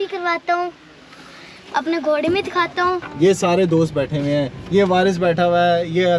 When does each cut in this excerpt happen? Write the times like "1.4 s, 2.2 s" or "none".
3.0 s